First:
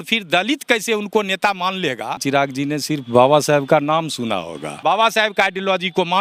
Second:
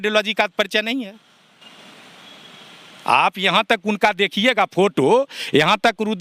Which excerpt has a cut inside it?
first; 2 cuts; at 2.2 s, 4.8 s

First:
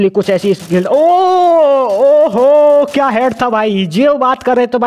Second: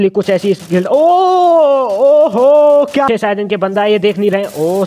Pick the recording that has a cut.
second; 1 cut; at 3.1 s

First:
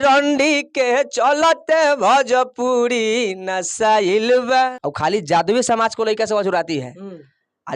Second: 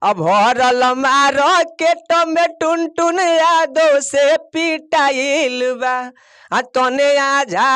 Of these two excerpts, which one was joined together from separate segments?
first; 1 cut; at 4.5 s

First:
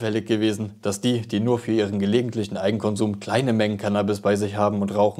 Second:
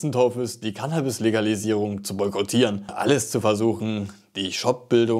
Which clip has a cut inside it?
second; 1 cut; at 2.9 s

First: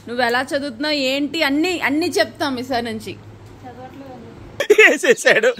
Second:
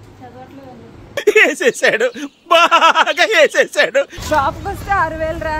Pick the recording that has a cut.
second; 1 cut; at 4.2 s

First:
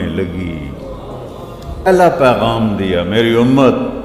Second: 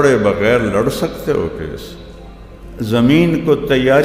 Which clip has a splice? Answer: first; 1 cut; at 1.9 s

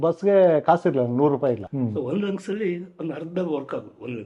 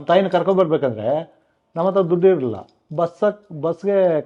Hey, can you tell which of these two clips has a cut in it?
first; 1 cut; at 1.7 s

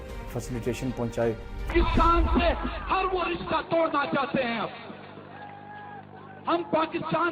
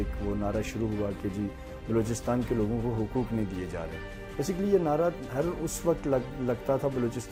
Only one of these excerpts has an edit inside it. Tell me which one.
first; 1 cut; at 1.5 s

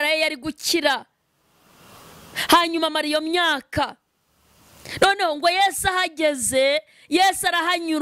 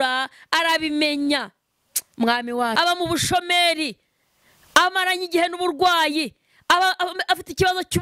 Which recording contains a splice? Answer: second; 1 cut; at 2.7 s

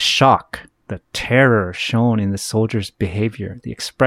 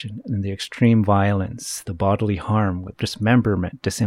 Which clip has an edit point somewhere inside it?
second; 2 cuts; at 1.8 s, 2.9 s

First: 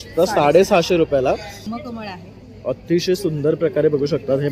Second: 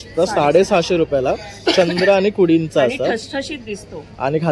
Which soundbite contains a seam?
first; 1 cut; at 1.5 s

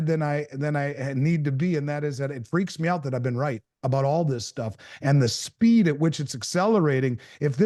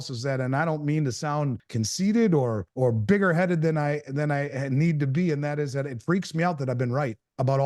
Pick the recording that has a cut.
second; 2 cuts; at 1.6 s, 2.6 s

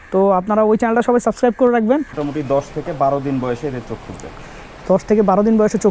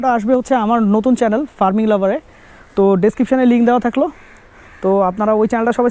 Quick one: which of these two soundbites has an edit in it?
first; 1 cut; at 2.2 s

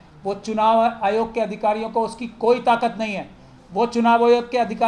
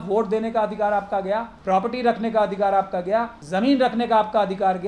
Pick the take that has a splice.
second; 2 cuts; at 1.5 s, 3.4 s

